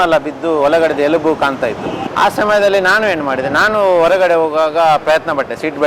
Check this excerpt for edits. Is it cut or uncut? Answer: cut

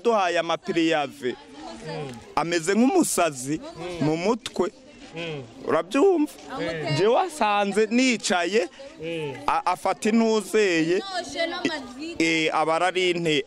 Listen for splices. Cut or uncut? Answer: uncut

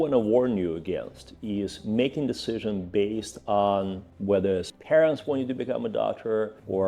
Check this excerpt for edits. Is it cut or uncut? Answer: cut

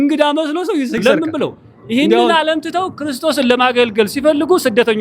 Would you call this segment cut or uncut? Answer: cut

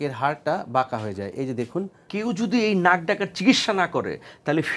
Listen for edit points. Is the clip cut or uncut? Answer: cut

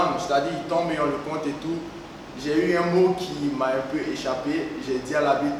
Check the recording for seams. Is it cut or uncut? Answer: uncut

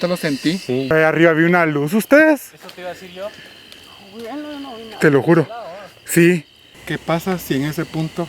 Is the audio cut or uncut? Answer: cut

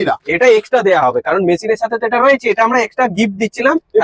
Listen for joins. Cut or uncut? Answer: uncut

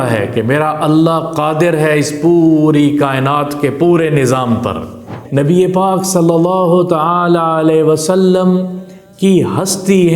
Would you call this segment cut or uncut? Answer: cut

